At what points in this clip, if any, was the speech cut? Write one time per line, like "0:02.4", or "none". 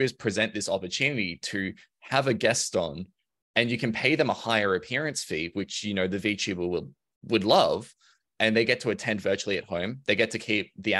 none